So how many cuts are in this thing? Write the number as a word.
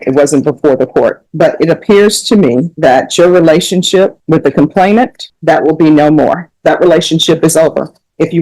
five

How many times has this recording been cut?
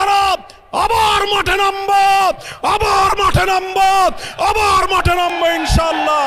zero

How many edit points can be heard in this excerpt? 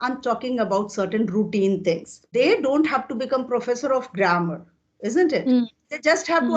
one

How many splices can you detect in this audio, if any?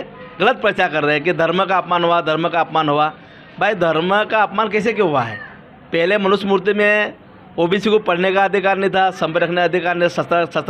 zero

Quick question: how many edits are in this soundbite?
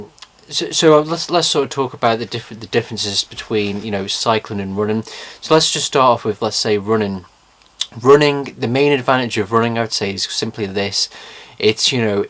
one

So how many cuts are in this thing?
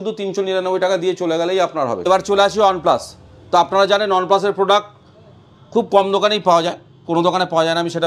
zero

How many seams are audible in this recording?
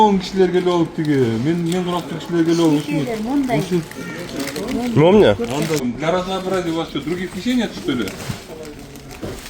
one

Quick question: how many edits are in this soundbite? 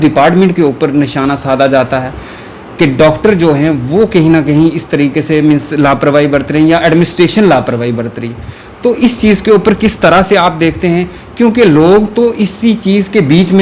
zero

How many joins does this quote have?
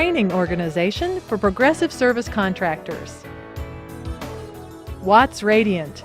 two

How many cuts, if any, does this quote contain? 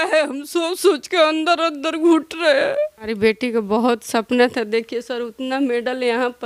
one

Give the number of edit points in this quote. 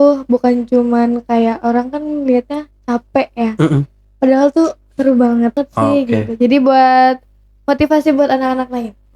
one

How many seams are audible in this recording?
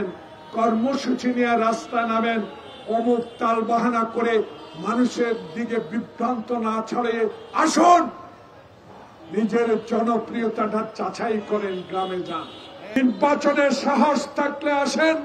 one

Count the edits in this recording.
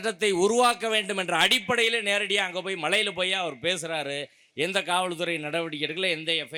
zero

